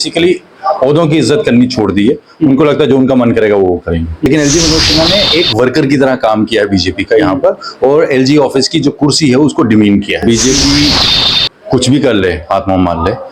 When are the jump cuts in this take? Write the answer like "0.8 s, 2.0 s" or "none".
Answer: 4.3 s, 10.2 s